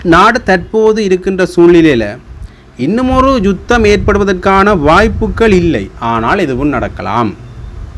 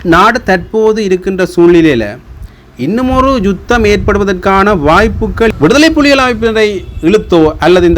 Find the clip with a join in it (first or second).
second